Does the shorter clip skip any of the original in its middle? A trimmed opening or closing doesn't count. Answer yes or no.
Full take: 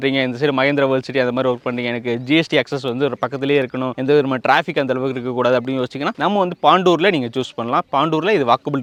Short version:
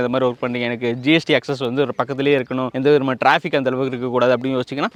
no